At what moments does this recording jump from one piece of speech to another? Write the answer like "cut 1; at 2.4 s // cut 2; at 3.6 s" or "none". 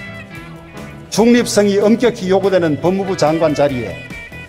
none